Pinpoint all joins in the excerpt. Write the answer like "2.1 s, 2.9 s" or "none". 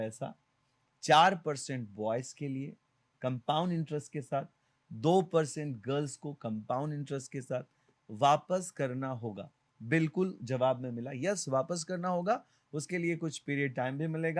none